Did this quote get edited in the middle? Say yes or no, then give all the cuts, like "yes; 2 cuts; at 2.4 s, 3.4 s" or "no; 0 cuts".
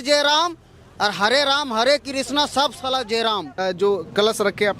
yes; 1 cut; at 3.6 s